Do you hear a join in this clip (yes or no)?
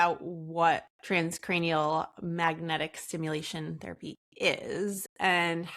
yes